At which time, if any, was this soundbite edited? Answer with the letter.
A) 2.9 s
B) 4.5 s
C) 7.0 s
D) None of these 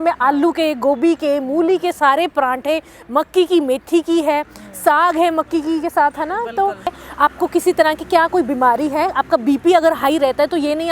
C